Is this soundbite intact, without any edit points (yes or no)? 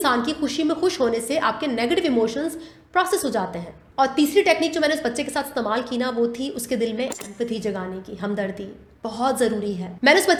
yes